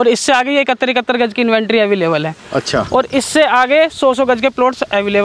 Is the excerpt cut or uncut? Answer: uncut